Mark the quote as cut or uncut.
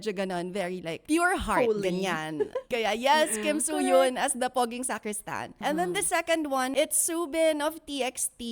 cut